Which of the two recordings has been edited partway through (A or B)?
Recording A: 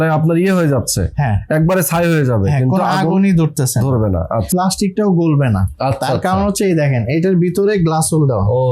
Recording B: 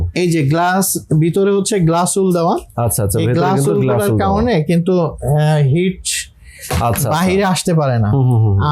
A